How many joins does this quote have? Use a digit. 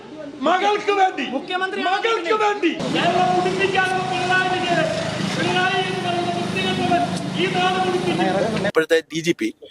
2